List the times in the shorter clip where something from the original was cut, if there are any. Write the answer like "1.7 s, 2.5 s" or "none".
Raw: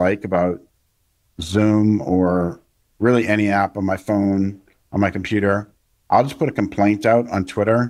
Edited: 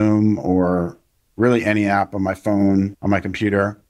3.0 s